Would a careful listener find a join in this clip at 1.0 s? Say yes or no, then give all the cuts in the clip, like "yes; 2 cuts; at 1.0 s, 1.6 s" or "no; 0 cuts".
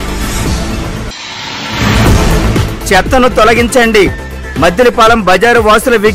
yes; 1 cut; at 1.0 s